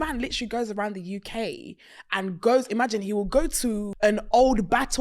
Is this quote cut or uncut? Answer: cut